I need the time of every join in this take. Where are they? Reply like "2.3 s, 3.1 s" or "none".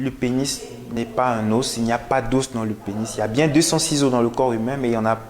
1.0 s